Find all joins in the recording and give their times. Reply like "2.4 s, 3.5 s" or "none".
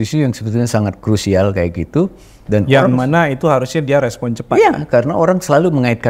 none